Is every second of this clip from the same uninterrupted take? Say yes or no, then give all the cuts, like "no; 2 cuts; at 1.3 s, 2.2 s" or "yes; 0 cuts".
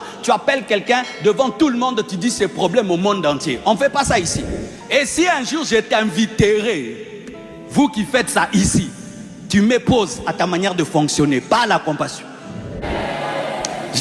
no; 1 cut; at 12.8 s